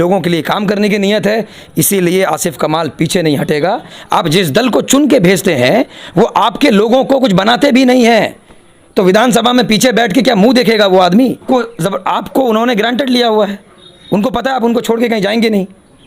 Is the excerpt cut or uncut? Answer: cut